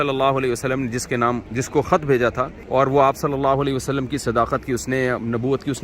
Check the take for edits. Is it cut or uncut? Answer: cut